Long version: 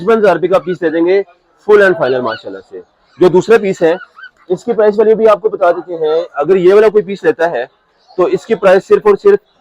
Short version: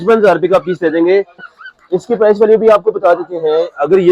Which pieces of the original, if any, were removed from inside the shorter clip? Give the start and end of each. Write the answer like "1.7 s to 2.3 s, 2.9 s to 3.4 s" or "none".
1.5 s to 4.1 s